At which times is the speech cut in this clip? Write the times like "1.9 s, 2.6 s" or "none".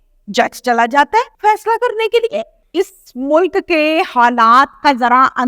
1.3 s, 2.6 s